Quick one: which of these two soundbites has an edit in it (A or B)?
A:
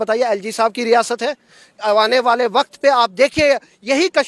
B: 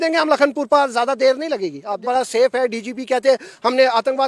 B